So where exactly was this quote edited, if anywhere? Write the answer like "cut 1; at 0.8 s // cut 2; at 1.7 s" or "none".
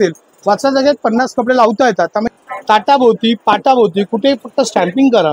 cut 1; at 2.3 s

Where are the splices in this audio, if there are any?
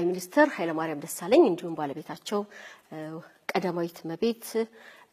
none

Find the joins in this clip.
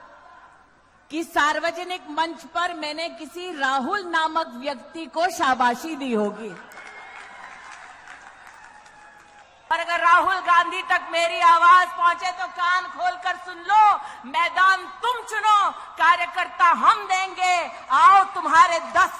cut 1; at 9.5 s

